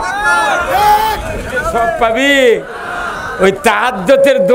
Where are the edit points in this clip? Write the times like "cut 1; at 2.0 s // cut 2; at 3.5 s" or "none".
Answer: cut 1; at 1.7 s